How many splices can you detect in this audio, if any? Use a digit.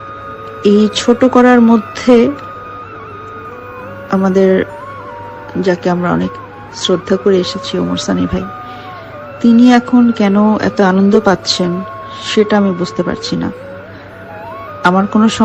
0